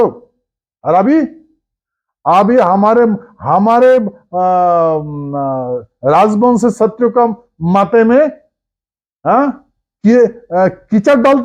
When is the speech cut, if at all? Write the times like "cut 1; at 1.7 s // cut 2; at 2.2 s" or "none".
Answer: none